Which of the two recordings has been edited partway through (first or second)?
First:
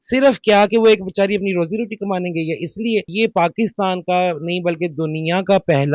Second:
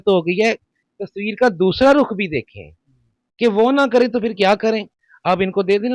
first